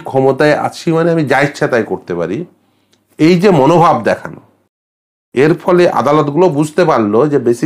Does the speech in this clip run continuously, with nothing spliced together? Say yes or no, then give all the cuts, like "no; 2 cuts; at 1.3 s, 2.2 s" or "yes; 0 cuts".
yes; 0 cuts